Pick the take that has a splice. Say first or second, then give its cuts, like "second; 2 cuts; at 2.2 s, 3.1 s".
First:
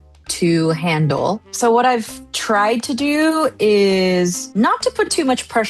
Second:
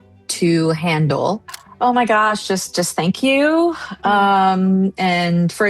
second; 1 cut; at 1.5 s